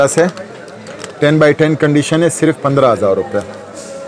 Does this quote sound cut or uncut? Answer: uncut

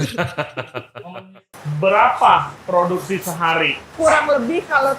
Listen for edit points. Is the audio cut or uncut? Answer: cut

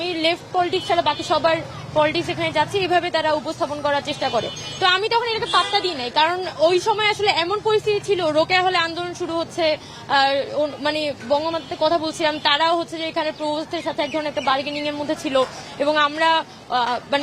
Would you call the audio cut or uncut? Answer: uncut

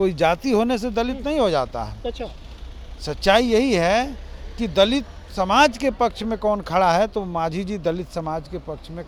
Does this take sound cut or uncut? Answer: uncut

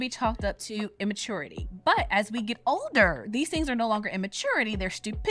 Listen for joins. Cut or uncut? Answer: cut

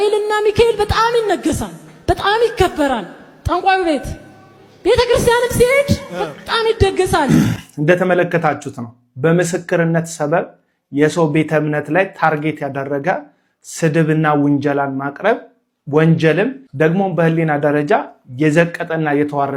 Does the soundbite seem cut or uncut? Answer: uncut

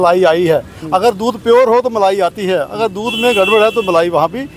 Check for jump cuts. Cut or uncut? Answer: uncut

